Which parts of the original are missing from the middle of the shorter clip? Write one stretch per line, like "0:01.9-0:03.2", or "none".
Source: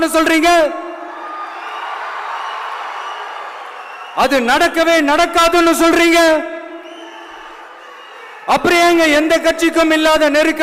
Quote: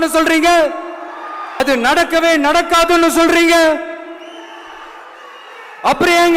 0:01.6-0:04.2